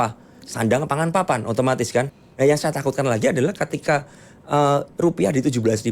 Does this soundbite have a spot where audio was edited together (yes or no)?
yes